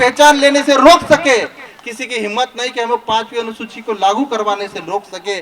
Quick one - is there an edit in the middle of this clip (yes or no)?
no